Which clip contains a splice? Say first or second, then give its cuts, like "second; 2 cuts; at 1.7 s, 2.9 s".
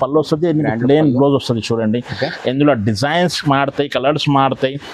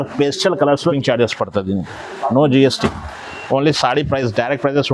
second; 1 cut; at 1.0 s